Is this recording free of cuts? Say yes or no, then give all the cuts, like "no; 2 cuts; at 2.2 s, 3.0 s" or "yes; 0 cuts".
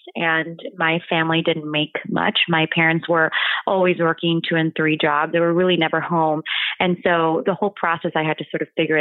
yes; 0 cuts